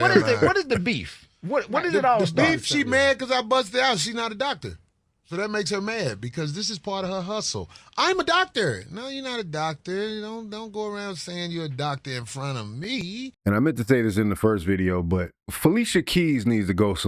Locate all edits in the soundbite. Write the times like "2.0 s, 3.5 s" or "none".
13.2 s